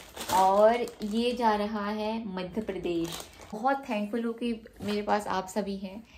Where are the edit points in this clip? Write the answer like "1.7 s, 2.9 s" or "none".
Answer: 3.5 s